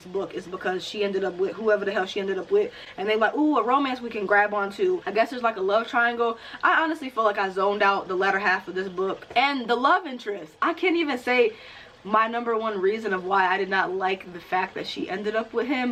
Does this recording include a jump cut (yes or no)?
no